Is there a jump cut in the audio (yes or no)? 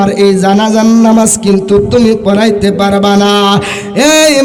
no